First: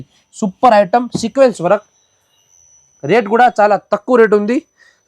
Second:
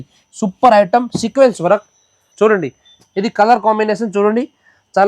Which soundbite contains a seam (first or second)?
second